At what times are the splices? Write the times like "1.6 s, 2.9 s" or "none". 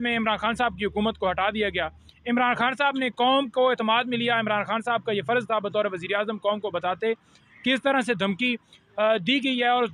none